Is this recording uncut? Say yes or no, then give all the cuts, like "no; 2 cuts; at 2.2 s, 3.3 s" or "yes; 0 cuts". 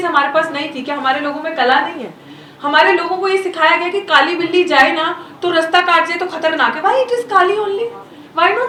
yes; 0 cuts